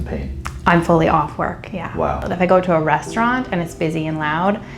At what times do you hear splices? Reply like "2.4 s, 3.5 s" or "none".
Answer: 2.2 s